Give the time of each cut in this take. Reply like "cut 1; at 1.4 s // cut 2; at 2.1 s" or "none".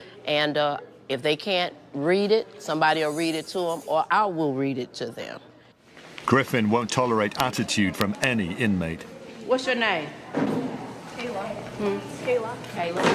cut 1; at 8.9 s

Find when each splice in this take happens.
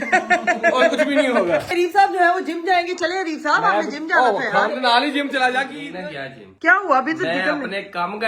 cut 1; at 1.7 s // cut 2; at 5.8 s

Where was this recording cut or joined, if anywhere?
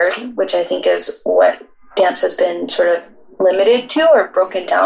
none

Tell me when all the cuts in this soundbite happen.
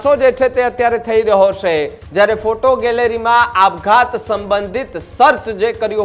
cut 1; at 2.0 s

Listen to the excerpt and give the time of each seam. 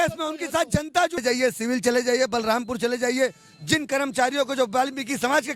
cut 1; at 1.2 s

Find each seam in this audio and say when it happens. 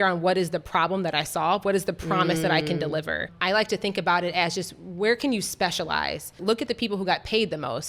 cut 1; at 3.3 s // cut 2; at 6.4 s

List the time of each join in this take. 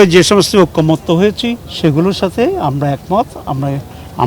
cut 1; at 1.7 s

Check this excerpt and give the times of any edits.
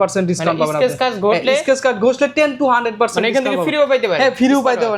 none

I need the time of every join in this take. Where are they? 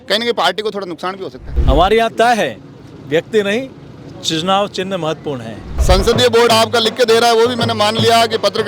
cut 1; at 1.5 s // cut 2; at 5.7 s

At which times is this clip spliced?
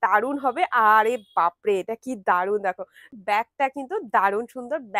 cut 1; at 3.0 s

